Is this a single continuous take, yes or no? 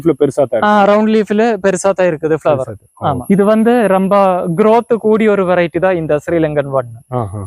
no